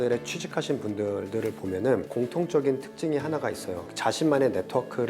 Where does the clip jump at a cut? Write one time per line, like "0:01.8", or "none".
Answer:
0:03.8